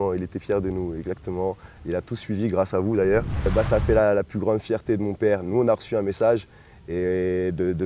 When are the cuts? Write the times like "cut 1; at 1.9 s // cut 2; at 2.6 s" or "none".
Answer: cut 1; at 3.5 s